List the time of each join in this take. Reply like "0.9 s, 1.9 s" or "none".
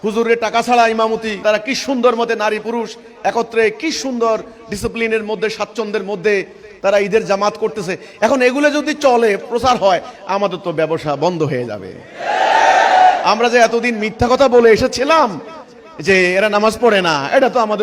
none